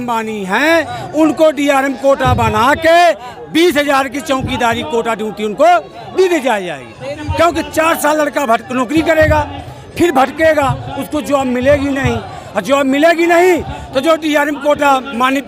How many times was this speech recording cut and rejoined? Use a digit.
0